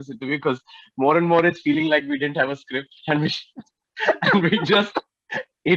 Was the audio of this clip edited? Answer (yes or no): no